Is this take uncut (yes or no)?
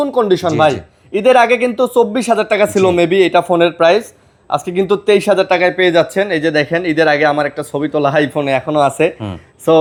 yes